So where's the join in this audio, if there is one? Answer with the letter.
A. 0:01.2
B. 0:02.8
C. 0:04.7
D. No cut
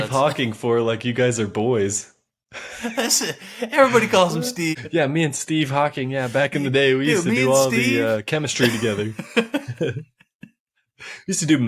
C